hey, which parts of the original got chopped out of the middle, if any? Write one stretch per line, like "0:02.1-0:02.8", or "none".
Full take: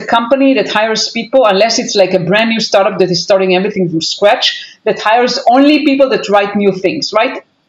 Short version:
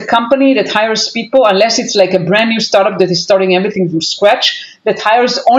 none